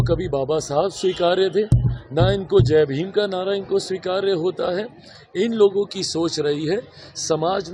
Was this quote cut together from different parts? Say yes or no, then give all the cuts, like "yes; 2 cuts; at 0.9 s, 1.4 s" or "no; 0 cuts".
no; 0 cuts